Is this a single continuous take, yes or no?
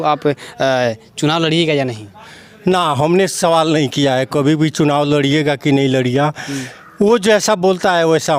yes